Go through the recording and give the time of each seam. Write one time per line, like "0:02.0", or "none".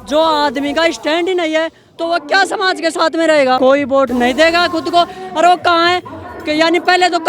0:03.6